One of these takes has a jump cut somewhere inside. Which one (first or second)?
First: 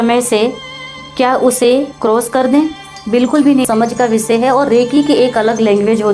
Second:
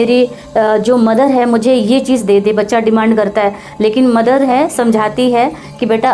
first